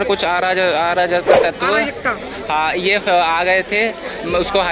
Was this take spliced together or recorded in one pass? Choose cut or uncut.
cut